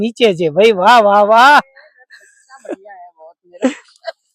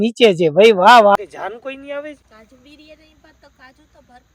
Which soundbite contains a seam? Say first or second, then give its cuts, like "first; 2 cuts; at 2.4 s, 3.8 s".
second; 2 cuts; at 1.2 s, 2.2 s